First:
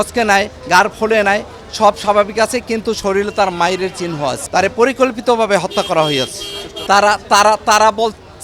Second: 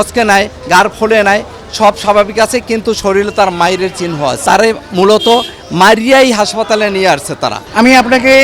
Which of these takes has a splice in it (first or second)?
second